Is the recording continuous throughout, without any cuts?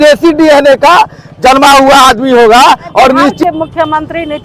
no; 1 cut; at 3.4 s

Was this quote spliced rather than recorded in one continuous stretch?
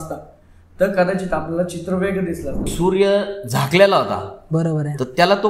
yes; 1 cut; at 2.6 s

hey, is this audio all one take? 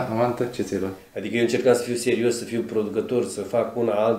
no; 1 cut; at 1.0 s

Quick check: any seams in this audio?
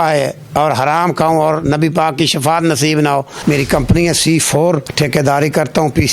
yes; 2 cuts; at 3.3 s, 4.9 s

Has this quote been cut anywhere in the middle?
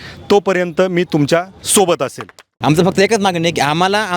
yes; 1 cut; at 2.4 s

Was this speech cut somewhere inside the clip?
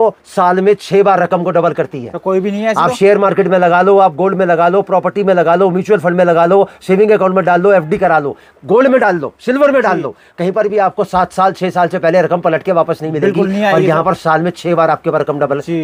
no; 0 cuts

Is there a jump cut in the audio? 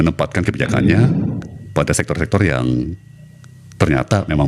no; 0 cuts

